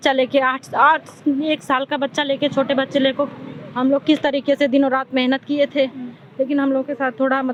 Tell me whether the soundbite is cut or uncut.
uncut